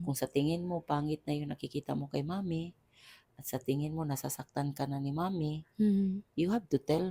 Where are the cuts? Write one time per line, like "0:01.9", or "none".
none